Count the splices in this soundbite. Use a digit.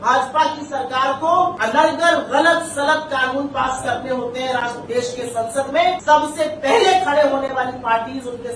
2